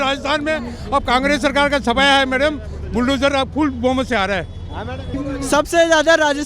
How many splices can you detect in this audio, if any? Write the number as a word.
one